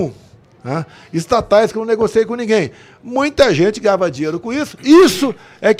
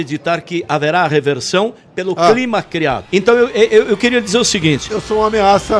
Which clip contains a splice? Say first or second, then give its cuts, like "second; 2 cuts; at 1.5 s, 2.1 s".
second; 1 cut; at 3.0 s